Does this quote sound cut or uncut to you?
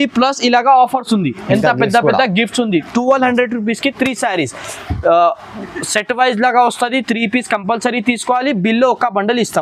uncut